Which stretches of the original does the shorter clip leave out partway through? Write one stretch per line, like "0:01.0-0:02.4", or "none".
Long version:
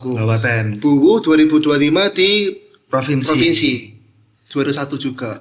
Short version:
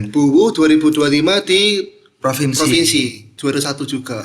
0:03.9-0:04.4